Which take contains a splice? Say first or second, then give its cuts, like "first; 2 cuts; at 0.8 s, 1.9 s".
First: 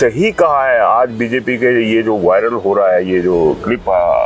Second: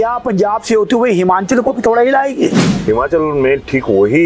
second; 1 cut; at 2.7 s